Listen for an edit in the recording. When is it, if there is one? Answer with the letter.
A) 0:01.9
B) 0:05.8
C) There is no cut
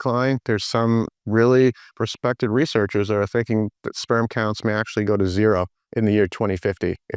B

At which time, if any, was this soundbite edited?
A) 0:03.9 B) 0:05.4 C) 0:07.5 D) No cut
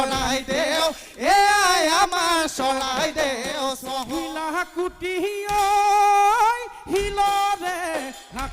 A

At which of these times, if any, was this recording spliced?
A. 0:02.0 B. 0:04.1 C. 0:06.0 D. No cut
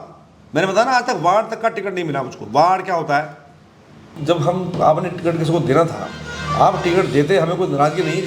B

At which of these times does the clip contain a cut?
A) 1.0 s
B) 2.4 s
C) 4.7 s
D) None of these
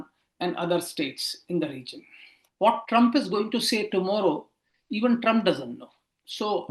B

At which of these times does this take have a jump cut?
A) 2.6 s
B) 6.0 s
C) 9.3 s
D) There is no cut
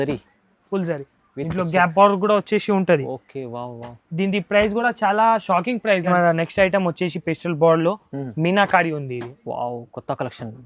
B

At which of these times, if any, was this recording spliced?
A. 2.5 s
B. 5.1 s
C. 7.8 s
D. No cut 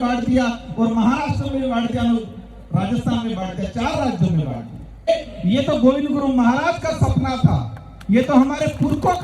B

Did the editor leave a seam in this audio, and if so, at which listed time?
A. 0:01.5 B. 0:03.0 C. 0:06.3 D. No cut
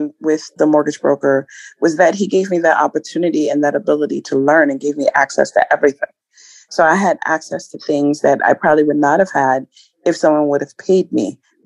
D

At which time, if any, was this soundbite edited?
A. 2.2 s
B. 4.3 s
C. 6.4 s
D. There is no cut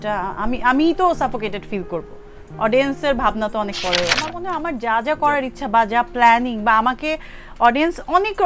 B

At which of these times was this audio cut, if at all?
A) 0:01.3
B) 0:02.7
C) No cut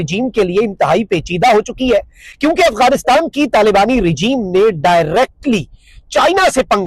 C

